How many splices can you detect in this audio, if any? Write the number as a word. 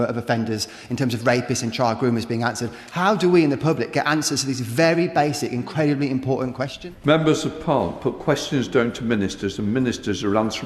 one